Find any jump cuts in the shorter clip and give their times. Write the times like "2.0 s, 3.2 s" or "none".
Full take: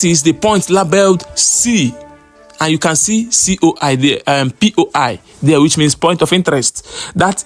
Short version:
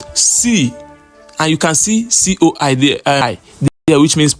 3.3 s